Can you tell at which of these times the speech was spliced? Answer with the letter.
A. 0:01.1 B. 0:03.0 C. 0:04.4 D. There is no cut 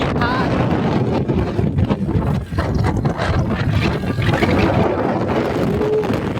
C